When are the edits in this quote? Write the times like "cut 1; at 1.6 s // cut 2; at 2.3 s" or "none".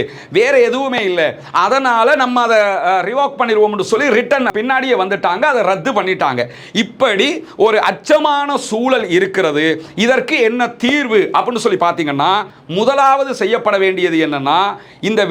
cut 1; at 6.6 s // cut 2; at 12.6 s